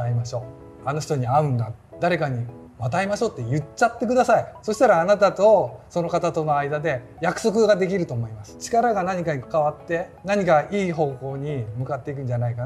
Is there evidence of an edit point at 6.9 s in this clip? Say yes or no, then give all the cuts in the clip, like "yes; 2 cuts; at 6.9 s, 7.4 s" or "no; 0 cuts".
no; 3 cuts; at 1.8 s, 8.5 s, 9.4 s